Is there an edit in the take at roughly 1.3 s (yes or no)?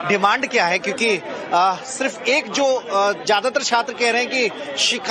yes